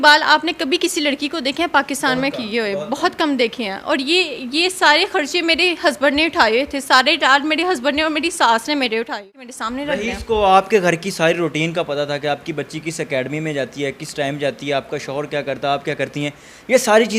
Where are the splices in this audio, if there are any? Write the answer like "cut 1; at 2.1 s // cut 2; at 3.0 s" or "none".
cut 1; at 9.3 s